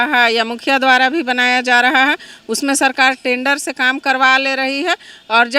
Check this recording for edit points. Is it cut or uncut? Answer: uncut